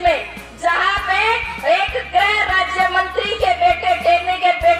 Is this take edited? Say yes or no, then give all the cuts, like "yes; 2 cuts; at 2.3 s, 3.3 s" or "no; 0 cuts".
no; 0 cuts